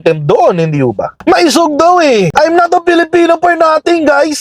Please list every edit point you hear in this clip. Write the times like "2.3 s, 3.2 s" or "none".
1.1 s